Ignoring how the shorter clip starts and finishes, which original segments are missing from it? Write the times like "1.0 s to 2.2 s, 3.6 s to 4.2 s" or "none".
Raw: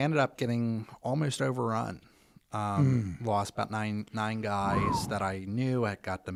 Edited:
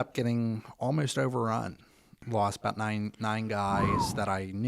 2.4 s to 3.1 s